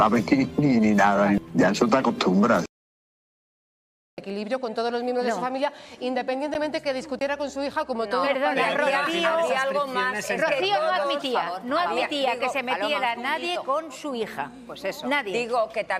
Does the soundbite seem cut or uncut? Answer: uncut